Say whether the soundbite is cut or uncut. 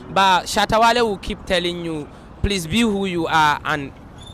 uncut